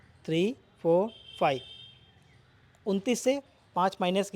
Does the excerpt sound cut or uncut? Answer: uncut